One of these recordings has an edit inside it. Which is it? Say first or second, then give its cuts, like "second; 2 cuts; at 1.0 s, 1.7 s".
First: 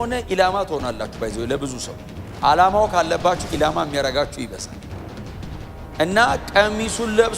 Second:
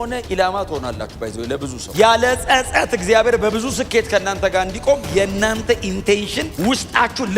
second; 2 cuts; at 1.8 s, 6.4 s